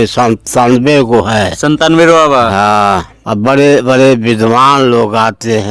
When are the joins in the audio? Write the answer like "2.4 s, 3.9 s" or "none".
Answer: 3.2 s